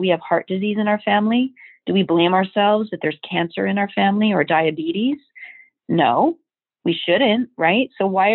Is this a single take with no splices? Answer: yes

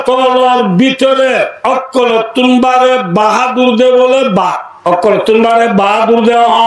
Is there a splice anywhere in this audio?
yes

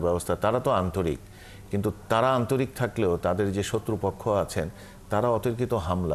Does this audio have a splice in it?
no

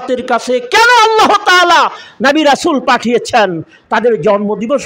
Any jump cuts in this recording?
no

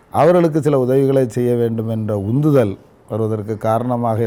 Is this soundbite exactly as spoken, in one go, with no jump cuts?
yes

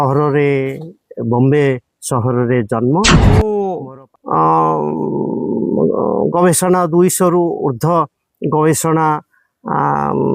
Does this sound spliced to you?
yes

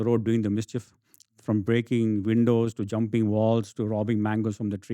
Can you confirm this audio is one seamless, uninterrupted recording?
yes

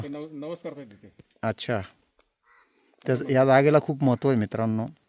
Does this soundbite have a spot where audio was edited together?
no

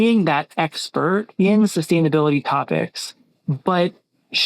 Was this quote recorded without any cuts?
no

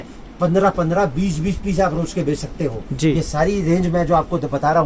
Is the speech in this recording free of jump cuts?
yes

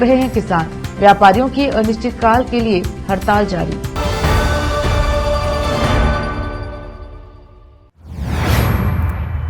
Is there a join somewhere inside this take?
yes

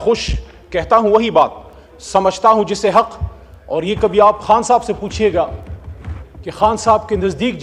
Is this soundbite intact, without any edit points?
yes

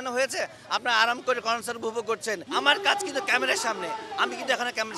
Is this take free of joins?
no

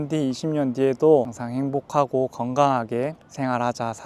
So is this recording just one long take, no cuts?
yes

